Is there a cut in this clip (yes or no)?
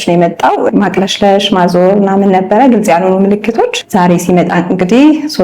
yes